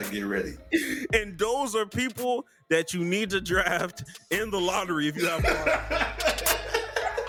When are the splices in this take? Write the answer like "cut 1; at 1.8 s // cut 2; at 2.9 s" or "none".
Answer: none